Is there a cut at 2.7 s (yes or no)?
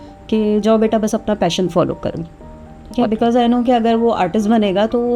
no